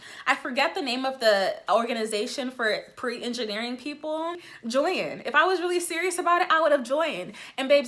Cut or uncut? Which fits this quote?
cut